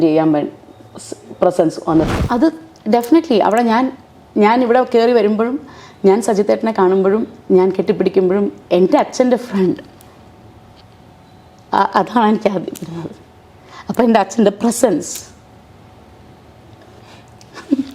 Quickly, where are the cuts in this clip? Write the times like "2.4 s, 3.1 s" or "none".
2.1 s